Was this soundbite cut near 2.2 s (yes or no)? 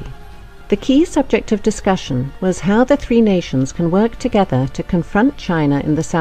yes